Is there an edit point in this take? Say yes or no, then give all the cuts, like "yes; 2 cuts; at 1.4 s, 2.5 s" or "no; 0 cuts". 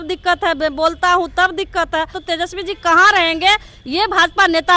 yes; 1 cut; at 2.2 s